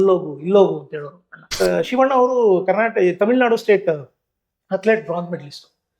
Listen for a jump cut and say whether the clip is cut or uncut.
cut